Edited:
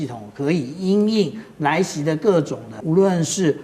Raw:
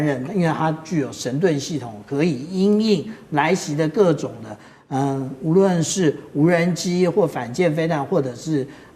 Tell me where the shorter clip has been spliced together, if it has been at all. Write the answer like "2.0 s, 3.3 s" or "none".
2.7 s